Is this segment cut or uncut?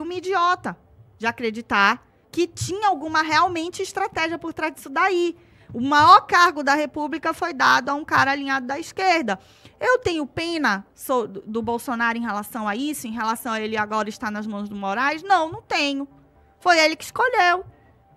uncut